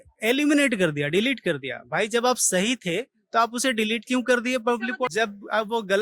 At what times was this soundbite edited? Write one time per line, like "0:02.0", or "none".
0:05.1